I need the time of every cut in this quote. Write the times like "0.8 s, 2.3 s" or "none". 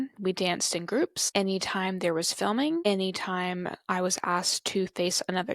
1.2 s, 2.8 s